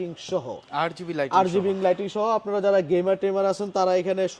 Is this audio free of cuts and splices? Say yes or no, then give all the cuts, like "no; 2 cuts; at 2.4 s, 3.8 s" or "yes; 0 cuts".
yes; 0 cuts